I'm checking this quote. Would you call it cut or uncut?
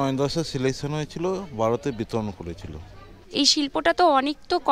cut